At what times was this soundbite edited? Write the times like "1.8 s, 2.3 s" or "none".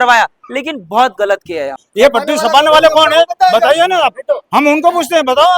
1.8 s